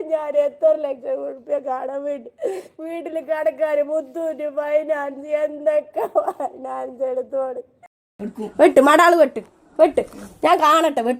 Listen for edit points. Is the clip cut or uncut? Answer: cut